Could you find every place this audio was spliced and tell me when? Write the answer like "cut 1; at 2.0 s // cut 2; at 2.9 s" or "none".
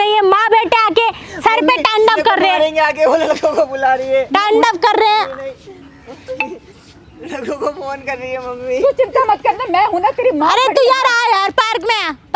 none